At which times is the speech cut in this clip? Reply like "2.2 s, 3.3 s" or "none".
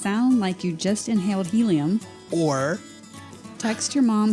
2.2 s